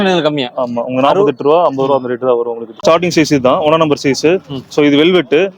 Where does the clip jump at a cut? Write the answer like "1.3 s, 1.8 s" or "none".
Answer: 2.8 s